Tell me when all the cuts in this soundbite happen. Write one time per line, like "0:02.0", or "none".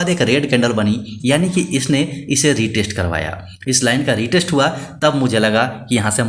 none